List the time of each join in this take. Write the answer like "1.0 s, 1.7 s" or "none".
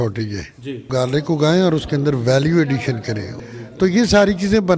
0.9 s, 3.4 s